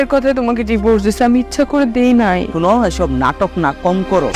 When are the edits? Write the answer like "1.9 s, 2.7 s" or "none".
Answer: 2.5 s